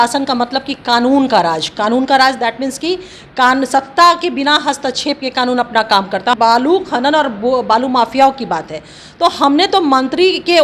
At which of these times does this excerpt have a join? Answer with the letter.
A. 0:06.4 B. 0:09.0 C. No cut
A